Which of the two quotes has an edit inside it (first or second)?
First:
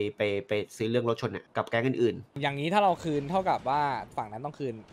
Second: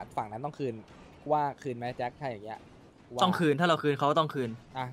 first